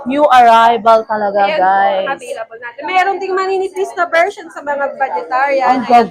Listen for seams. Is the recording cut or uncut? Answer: uncut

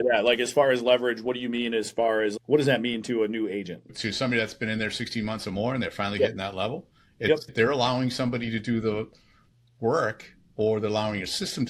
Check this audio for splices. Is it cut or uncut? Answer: cut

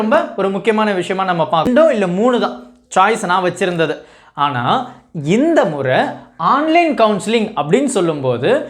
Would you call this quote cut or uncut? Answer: cut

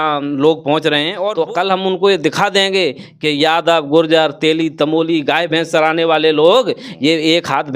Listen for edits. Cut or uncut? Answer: cut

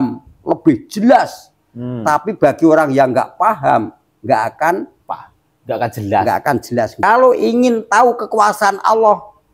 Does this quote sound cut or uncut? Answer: cut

